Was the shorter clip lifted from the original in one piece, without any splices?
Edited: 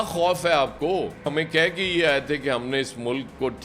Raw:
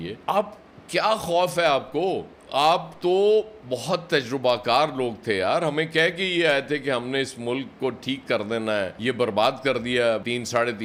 no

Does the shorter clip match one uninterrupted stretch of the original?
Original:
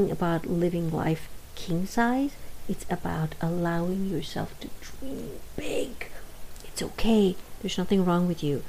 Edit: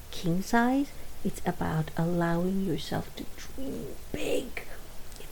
yes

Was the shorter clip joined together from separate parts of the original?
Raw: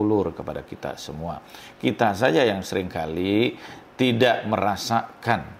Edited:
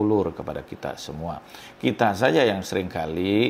no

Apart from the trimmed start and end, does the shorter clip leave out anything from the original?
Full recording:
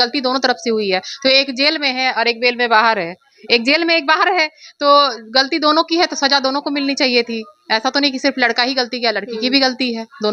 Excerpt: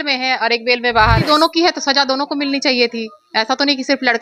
yes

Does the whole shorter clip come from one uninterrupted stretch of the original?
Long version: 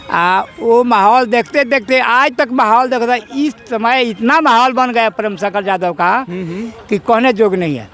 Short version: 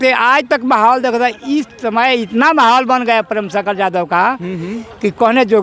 yes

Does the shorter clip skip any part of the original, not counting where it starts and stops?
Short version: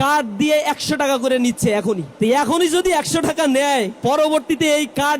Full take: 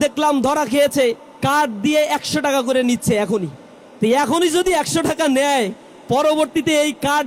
yes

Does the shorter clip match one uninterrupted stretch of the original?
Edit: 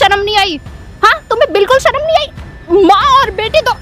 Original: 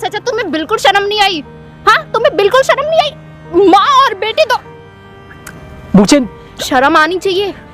yes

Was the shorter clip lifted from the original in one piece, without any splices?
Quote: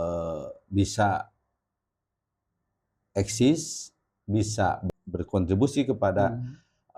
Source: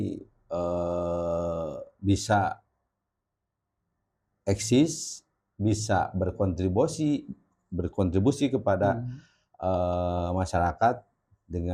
no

